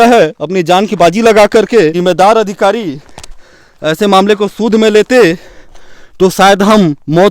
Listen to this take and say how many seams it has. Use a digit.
1